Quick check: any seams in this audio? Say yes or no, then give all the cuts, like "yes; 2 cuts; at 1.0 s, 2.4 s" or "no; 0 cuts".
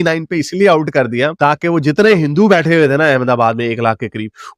no; 0 cuts